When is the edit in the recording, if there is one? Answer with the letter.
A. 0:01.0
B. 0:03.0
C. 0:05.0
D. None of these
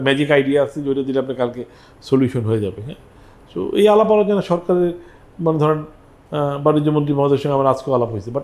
D